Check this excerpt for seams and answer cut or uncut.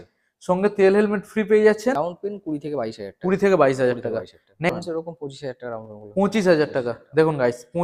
cut